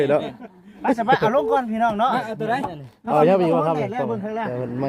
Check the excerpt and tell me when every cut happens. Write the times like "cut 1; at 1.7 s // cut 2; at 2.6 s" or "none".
none

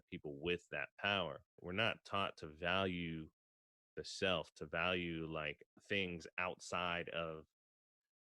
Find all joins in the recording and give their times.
cut 1; at 1.6 s

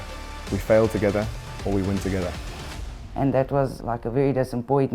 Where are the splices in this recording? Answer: cut 1; at 2.5 s // cut 2; at 3.8 s

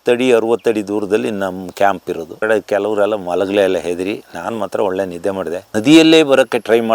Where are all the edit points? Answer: cut 1; at 2.4 s // cut 2; at 5.6 s

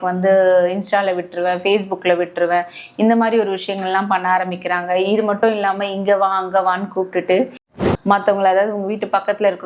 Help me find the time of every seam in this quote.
cut 1; at 7.6 s

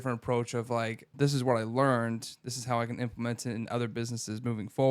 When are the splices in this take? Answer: cut 1; at 1.1 s

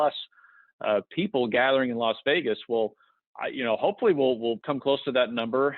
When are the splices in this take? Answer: cut 1; at 4.6 s

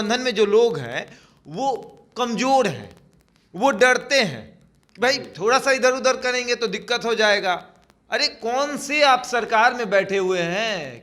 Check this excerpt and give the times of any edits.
none

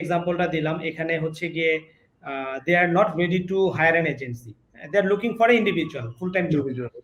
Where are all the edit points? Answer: none

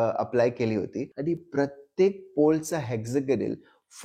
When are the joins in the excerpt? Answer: cut 1; at 1.0 s

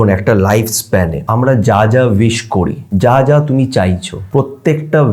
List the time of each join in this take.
cut 1; at 1.2 s // cut 2; at 2.8 s // cut 3; at 4.1 s

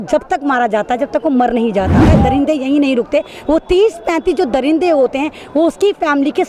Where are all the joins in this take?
cut 1; at 2.1 s

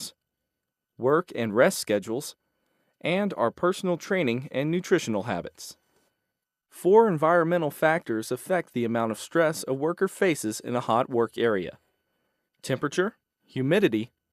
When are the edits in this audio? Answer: cut 1; at 3.1 s

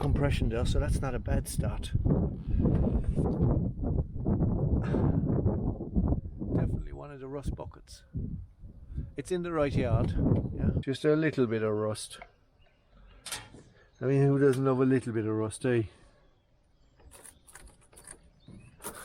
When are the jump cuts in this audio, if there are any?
cut 1; at 3.2 s // cut 2; at 10.8 s

